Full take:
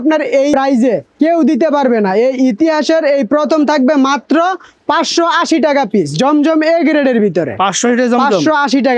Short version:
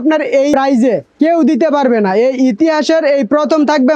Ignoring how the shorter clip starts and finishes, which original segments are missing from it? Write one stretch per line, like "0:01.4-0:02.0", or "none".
none